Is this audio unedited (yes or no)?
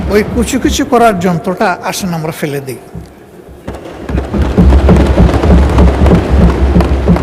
yes